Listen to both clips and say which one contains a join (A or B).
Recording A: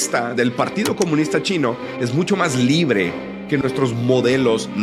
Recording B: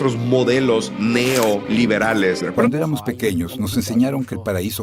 B